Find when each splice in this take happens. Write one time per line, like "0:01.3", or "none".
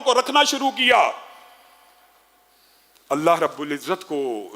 none